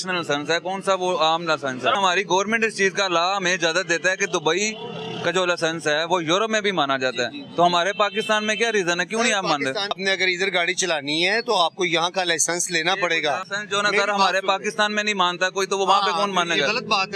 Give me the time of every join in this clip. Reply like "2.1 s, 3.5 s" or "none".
1.9 s, 9.9 s, 13.6 s

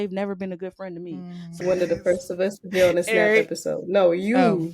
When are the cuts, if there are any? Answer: 1.6 s

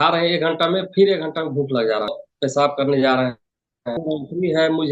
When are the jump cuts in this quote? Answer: 2.2 s, 4.0 s

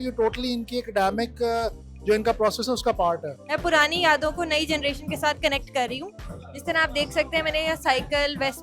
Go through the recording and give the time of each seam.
3.3 s

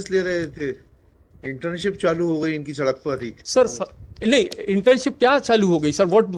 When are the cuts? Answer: none

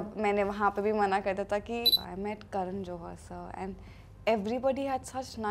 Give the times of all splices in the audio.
1.9 s

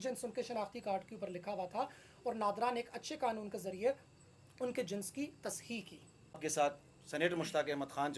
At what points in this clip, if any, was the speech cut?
6.4 s

